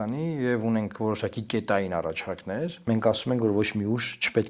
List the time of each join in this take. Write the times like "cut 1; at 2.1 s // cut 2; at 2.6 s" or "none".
cut 1; at 2.8 s